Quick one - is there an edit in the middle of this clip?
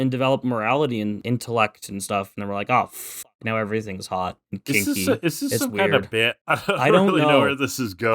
yes; 1 cut; at 1.2 s

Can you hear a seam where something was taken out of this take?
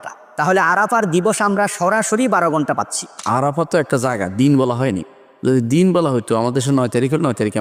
yes; 1 cut; at 3.2 s

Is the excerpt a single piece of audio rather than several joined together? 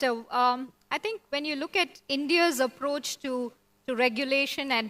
yes; 0 cuts

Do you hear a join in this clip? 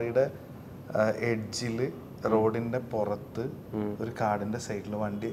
no; 0 cuts

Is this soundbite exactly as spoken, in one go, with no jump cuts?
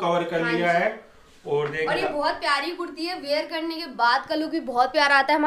yes; 0 cuts

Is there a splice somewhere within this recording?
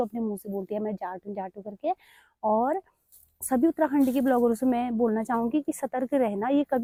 no; 0 cuts

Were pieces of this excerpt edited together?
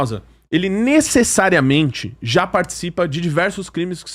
no; 0 cuts

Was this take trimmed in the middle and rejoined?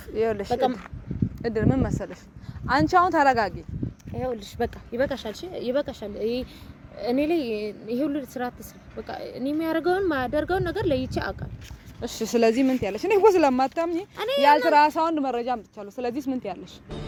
no; 0 cuts

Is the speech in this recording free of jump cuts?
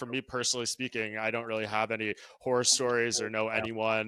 yes; 0 cuts

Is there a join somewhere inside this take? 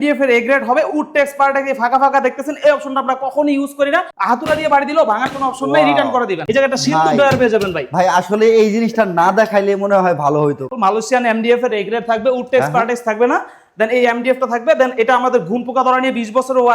yes; 3 cuts; at 4.1 s, 6.4 s, 10.7 s

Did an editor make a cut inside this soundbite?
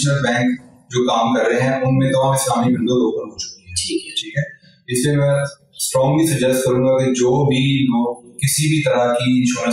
no; 0 cuts

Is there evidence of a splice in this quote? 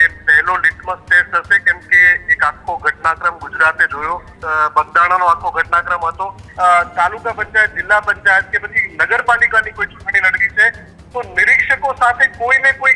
yes; 2 cuts; at 4.4 s, 6.4 s

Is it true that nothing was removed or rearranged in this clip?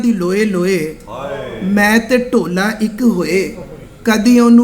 yes; 0 cuts

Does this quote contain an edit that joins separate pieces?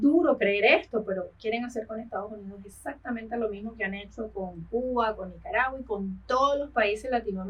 no; 0 cuts

